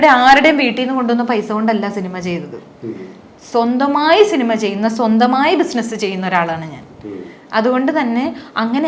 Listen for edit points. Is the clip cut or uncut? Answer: uncut